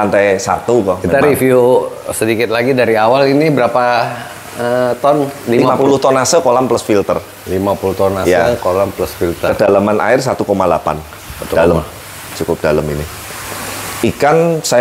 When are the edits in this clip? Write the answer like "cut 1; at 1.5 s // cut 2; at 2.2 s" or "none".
none